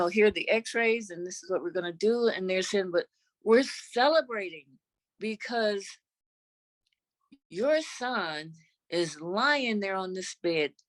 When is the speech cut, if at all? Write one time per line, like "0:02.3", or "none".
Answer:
none